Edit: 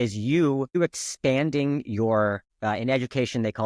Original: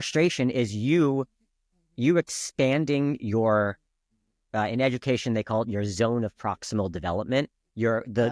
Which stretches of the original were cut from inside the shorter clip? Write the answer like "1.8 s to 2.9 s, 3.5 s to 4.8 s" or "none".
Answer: 1.3 s to 2.1 s, 3.8 s to 4.4 s